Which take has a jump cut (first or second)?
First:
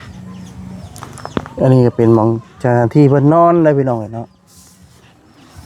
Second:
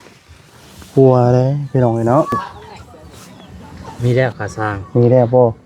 second